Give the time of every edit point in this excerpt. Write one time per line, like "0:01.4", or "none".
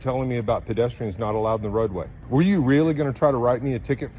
0:02.1

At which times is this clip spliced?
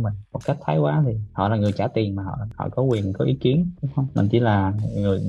none

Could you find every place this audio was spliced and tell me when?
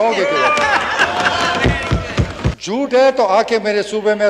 0:02.6

